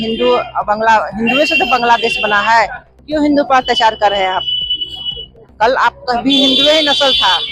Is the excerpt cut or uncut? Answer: uncut